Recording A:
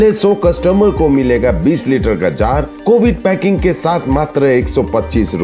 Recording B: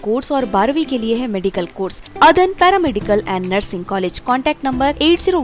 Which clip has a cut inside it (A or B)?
B